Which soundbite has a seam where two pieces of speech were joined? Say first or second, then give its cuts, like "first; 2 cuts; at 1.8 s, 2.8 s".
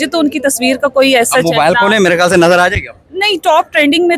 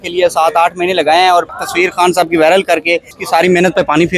second; 2 cuts; at 1.6 s, 3.1 s